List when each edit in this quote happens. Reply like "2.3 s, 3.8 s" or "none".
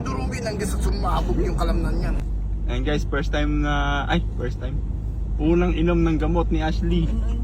2.3 s